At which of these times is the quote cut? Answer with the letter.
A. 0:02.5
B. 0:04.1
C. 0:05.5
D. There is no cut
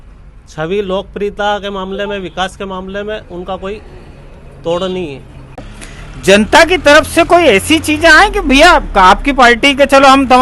D